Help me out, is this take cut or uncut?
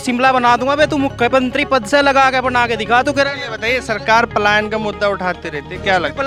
uncut